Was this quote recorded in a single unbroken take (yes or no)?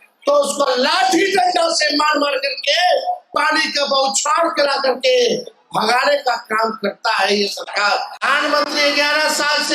no